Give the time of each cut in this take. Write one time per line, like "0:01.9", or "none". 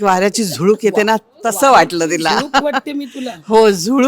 none

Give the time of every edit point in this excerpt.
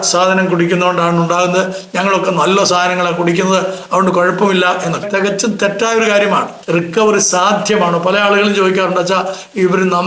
0:06.5

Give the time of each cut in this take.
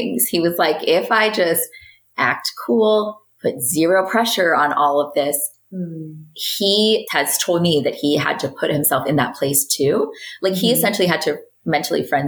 0:05.5

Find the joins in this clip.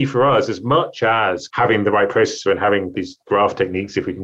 0:01.4
0:02.9

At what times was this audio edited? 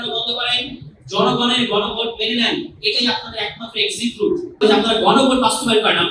0:04.6

